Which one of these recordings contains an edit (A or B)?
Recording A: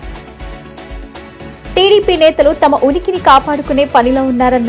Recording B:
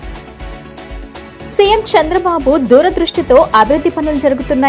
A